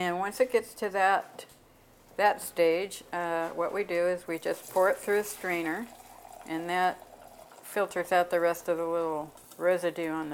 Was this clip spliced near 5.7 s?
no; 1 cut; at 9.4 s

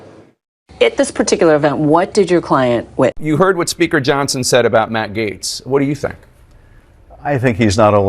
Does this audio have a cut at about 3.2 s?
yes; 1 cut; at 3.2 s

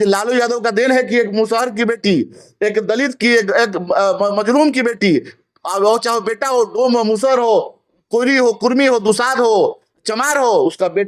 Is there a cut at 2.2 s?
no; 0 cuts

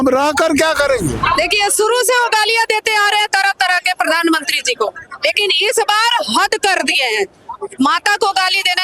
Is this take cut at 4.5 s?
no; 1 cut; at 1.2 s

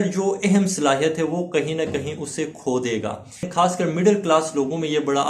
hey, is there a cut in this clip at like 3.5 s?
yes; 1 cut; at 3.5 s

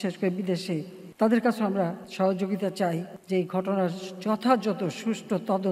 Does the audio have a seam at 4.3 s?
no; 3 cuts; at 1.0 s, 2.0 s, 3.1 s

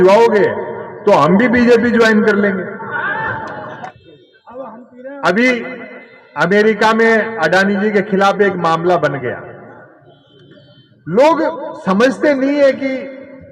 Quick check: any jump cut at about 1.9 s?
no; 1 cut; at 3.9 s

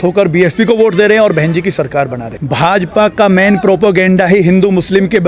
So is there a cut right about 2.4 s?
yes; 1 cut; at 2.4 s

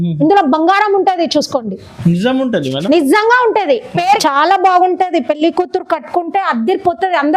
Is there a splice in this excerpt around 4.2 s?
yes; 1 cut; at 4.2 s

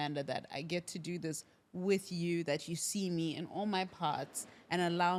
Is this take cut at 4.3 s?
no; 0 cuts

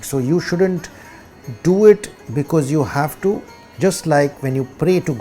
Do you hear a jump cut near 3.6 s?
yes; 1 cut; at 3.6 s

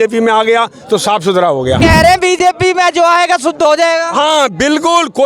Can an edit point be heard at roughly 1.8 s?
yes; 1 cut; at 1.8 s

